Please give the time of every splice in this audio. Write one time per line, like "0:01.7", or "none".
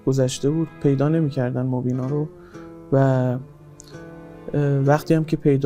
none